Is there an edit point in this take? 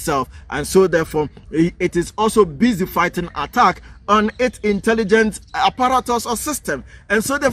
no; 0 cuts

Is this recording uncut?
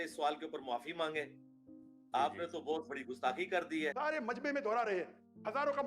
no; 1 cut; at 3.9 s

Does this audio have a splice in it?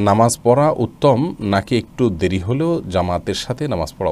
no; 0 cuts

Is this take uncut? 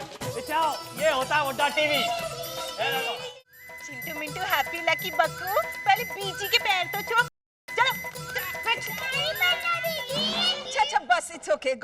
no; 1 cut; at 3.2 s

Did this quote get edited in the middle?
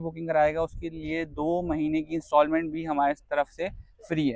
no; 0 cuts

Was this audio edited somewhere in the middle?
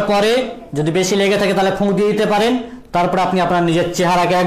no; 0 cuts

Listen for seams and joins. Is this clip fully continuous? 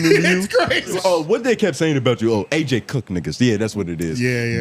no; 1 cut; at 0.9 s

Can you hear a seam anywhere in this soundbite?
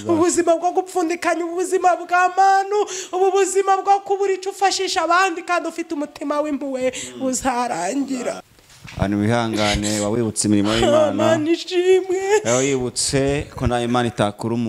yes; 1 cut; at 8.5 s

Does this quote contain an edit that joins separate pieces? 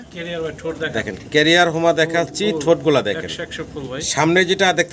no; 0 cuts

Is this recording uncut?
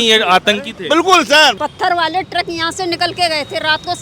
no; 1 cut; at 1.6 s

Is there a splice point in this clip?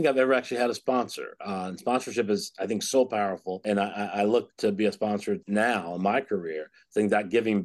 no; 0 cuts

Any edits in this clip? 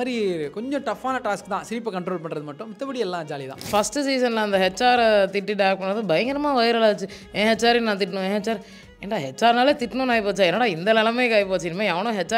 yes; 1 cut; at 3.7 s

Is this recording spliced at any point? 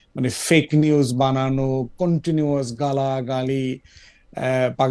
no; 0 cuts

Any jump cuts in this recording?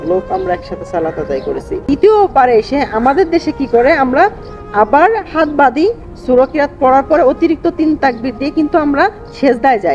yes; 1 cut; at 1.7 s

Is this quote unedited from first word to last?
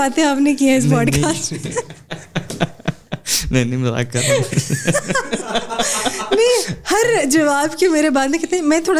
yes; 0 cuts

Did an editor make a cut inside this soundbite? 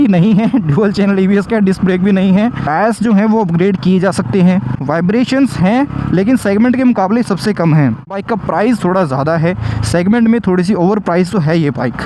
no; 0 cuts

